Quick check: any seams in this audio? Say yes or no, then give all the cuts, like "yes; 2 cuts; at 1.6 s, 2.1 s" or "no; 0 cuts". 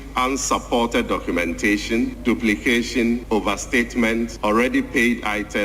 yes; 3 cuts; at 2.2 s, 3.2 s, 4.3 s